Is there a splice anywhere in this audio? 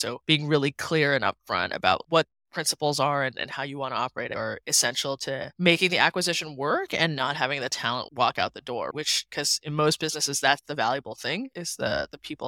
no; 0 cuts

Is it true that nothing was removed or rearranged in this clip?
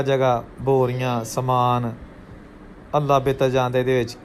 yes; 0 cuts

